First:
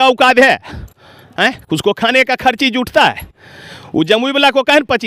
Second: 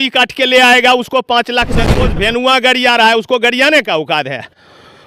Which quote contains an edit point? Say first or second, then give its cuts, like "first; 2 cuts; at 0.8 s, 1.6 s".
second; 1 cut; at 1.9 s